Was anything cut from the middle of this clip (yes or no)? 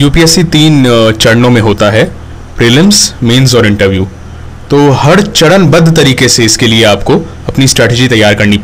no